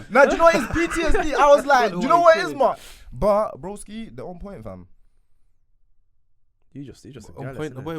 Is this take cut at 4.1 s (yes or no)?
no